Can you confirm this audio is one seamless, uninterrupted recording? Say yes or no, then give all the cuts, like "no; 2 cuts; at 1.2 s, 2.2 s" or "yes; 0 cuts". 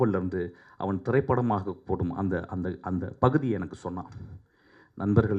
yes; 0 cuts